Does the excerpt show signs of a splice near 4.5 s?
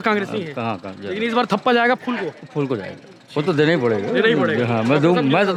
no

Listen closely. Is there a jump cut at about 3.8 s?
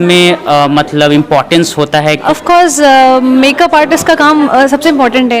no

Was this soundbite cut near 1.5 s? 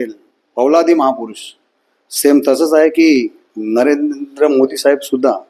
no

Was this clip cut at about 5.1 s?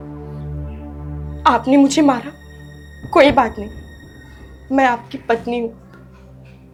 no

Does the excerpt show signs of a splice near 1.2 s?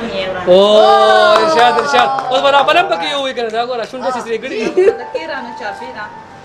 no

